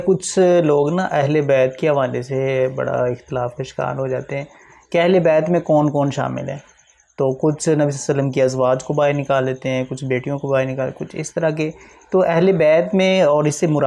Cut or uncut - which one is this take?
uncut